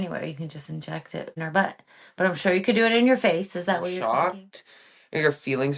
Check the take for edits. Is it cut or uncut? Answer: cut